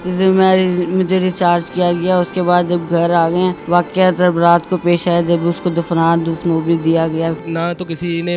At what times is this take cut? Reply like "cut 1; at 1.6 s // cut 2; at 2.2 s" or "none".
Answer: cut 1; at 3.6 s // cut 2; at 7.5 s